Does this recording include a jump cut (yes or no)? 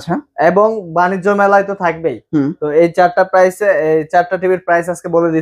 no